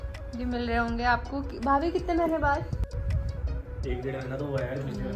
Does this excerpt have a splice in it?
no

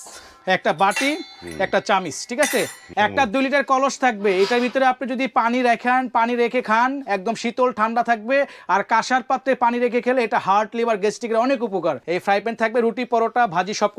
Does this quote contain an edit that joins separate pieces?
yes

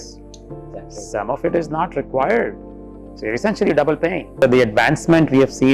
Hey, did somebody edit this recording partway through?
yes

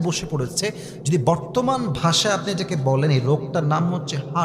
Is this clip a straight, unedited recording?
yes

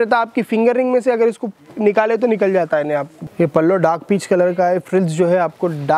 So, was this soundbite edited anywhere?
yes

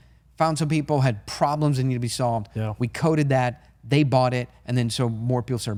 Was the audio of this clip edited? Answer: no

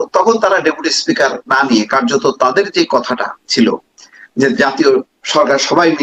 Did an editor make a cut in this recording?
no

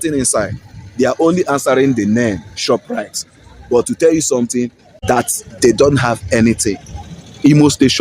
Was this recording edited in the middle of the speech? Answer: yes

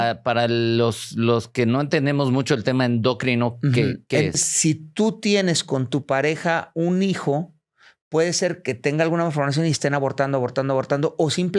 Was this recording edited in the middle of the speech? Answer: yes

